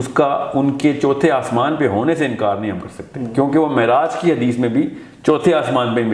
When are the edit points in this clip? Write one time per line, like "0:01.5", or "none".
none